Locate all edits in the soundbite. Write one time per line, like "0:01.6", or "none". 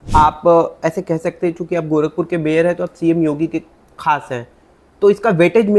none